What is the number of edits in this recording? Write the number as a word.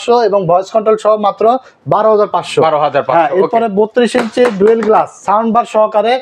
zero